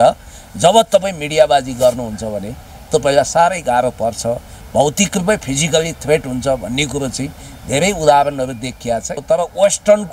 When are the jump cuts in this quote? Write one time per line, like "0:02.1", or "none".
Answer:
0:09.2